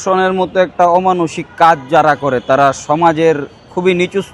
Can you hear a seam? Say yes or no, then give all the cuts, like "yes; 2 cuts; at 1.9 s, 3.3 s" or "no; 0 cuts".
no; 0 cuts